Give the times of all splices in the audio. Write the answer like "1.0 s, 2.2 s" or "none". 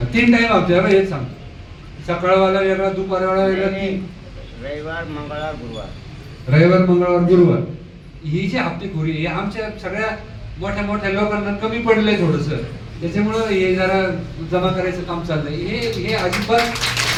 none